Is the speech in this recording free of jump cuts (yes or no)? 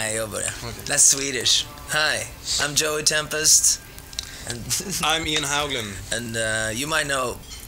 yes